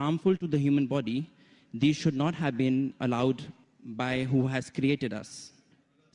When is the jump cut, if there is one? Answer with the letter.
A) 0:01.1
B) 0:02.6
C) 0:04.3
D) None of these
B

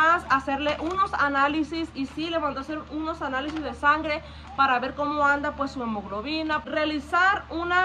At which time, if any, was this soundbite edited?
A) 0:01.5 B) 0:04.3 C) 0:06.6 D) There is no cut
C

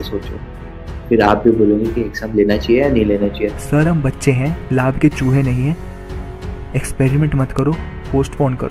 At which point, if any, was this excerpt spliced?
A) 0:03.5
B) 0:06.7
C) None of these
A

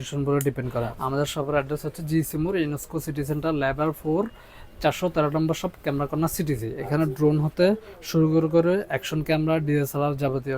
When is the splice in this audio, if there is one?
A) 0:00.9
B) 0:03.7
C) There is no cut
A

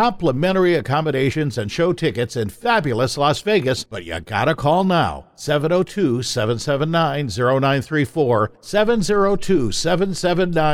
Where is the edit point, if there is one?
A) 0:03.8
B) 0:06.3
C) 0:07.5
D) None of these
A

